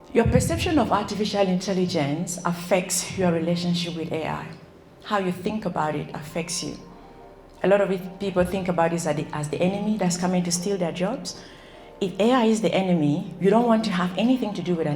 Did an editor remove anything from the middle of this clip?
no; 0 cuts

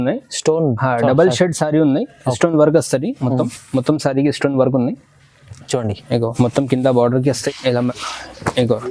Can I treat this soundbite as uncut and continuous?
no; 1 cut; at 7.5 s

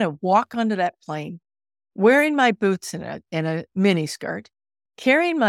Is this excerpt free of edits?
yes; 0 cuts

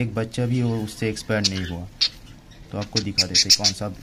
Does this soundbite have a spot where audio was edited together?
no; 0 cuts

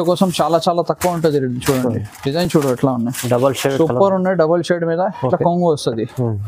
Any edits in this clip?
no; 0 cuts

